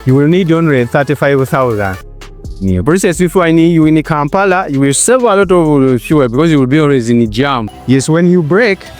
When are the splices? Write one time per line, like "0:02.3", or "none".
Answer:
0:02.5
0:08.0